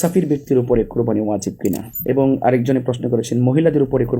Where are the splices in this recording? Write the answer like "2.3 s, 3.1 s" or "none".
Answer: 1.9 s